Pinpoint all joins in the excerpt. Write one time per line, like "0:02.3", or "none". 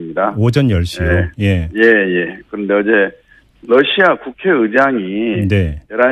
0:03.3